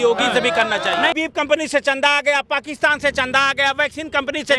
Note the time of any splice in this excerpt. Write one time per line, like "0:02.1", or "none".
0:01.1